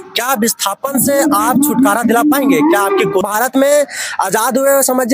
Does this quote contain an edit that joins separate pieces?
yes; 1 cut; at 3.3 s

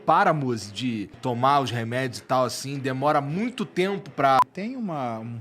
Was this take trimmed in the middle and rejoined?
yes; 2 cuts; at 1.1 s, 4.4 s

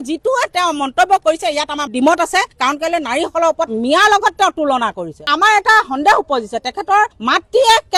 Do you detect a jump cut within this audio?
no; 0 cuts

